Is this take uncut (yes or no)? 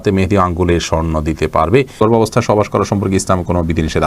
no